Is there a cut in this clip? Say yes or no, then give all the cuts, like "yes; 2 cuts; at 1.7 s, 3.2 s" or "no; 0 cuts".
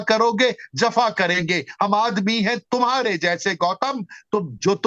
no; 0 cuts